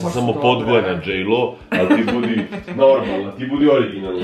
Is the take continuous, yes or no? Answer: yes